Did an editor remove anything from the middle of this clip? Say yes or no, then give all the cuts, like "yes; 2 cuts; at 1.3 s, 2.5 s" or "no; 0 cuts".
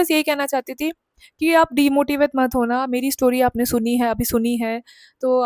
no; 0 cuts